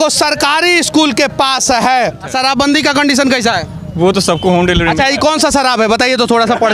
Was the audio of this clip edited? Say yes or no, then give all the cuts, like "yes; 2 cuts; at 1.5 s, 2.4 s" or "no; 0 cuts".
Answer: yes; 1 cut; at 2.3 s